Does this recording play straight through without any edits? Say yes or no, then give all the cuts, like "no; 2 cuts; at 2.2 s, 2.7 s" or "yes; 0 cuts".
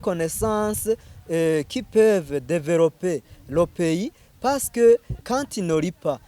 no; 1 cut; at 5.2 s